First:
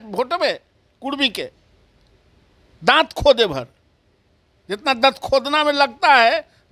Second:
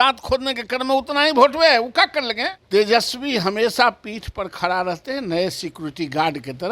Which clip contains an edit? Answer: second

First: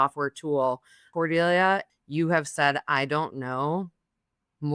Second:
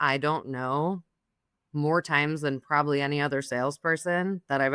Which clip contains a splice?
first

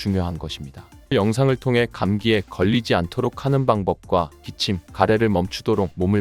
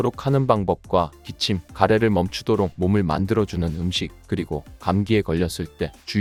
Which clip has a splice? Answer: first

